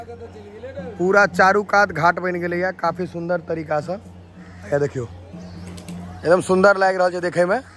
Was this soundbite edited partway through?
no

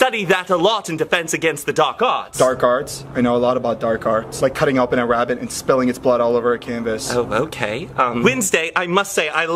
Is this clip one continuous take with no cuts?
no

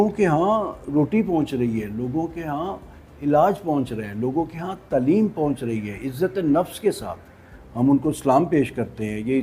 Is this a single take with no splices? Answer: yes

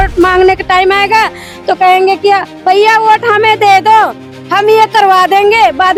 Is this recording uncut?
yes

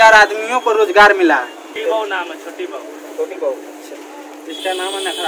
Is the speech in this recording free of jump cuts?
no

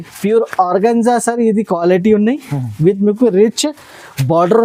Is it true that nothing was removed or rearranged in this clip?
yes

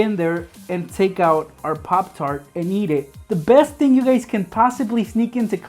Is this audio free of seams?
no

